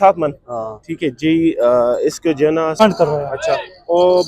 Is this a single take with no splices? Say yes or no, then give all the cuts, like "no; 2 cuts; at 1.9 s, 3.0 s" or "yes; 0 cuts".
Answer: no; 1 cut; at 2.8 s